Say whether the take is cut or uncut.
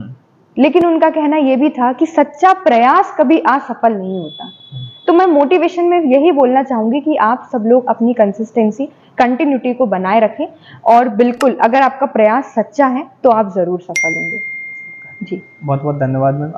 uncut